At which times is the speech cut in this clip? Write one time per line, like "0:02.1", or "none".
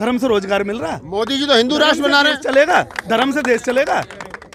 none